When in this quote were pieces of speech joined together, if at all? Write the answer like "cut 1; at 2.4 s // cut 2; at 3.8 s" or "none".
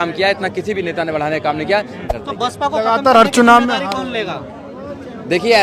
cut 1; at 2.0 s

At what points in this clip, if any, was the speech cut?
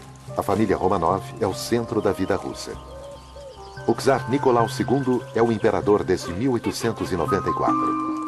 none

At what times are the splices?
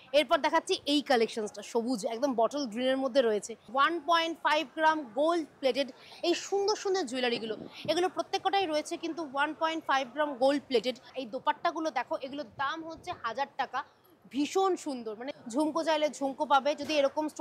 cut 1; at 3.7 s // cut 2; at 11.1 s // cut 3; at 15.2 s

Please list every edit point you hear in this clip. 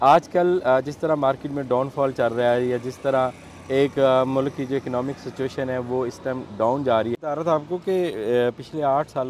cut 1; at 7.1 s

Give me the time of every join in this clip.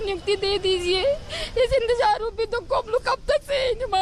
cut 1; at 1.2 s

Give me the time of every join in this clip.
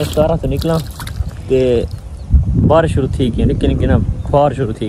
none

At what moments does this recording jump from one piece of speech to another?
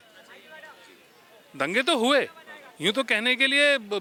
none

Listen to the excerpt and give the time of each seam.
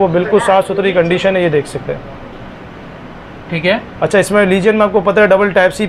none

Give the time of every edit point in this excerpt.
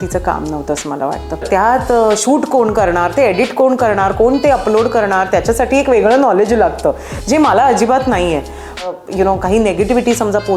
cut 1; at 1.4 s // cut 2; at 8.9 s

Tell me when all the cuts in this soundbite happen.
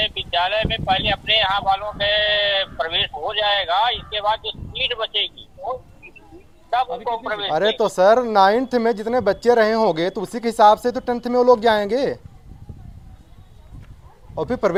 none

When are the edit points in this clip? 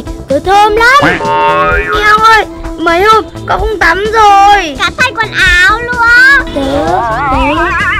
none

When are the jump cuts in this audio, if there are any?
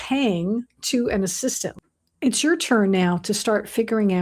cut 1; at 1.8 s

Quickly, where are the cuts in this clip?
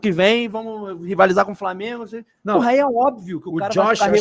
none

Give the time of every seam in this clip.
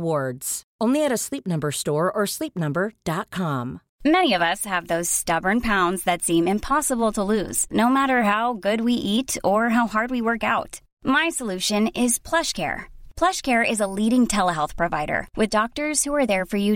cut 1; at 3.8 s

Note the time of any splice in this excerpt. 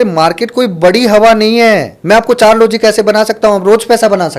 cut 1; at 1.9 s

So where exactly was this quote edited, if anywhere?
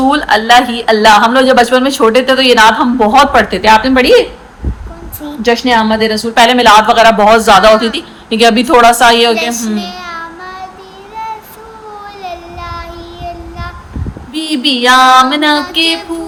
none

